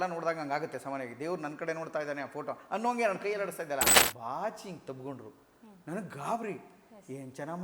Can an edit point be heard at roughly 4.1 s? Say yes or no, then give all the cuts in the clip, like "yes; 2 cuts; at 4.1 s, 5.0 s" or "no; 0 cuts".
yes; 1 cut; at 4.1 s